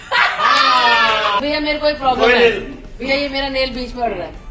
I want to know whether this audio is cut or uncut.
cut